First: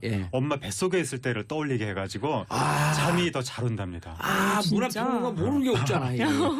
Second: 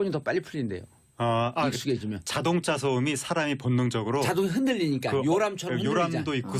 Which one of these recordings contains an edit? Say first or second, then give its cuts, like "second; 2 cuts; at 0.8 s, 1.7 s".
second; 1 cut; at 3.1 s